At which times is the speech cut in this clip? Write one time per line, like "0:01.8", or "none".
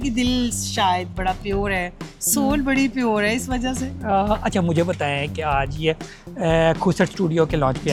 none